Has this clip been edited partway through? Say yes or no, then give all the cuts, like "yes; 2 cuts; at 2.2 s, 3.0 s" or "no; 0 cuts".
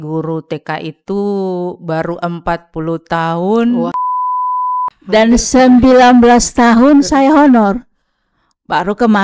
yes; 1 cut; at 4.5 s